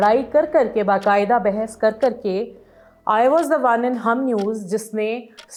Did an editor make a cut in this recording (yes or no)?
no